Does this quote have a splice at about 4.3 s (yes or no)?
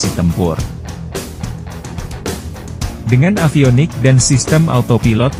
no